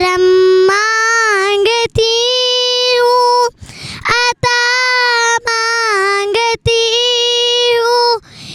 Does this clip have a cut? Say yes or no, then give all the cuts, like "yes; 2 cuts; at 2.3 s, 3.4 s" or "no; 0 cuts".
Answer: no; 0 cuts